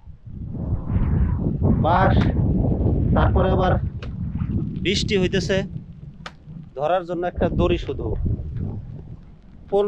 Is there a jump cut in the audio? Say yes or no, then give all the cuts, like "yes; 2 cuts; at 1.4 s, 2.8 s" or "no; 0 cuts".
no; 0 cuts